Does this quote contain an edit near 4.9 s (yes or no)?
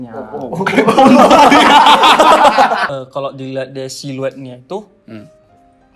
no